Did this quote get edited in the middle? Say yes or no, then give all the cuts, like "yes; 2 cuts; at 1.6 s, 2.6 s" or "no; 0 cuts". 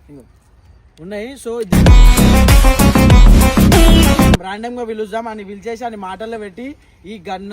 yes; 1 cut; at 4.4 s